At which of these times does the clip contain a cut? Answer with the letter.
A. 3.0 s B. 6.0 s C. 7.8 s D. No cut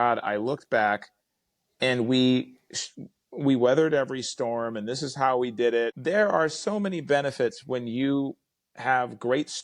B